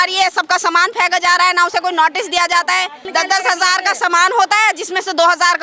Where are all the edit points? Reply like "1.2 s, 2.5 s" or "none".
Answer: 3.0 s

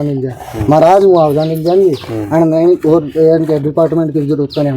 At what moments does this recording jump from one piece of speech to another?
none

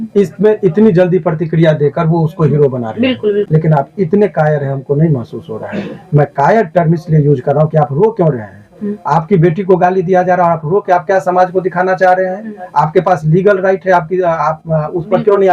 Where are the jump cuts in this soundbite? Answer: 3.5 s

